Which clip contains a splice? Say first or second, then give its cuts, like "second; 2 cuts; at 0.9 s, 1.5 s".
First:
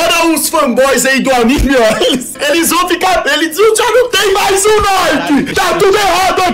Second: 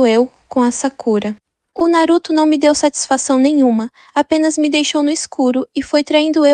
first; 2 cuts; at 2.3 s, 5.5 s